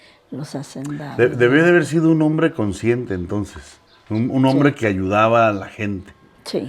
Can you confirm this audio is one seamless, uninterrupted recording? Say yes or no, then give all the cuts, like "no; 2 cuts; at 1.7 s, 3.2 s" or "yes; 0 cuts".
yes; 0 cuts